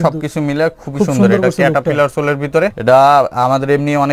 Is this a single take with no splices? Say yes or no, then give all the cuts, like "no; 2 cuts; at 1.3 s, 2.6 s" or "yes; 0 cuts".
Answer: no; 1 cut; at 2.8 s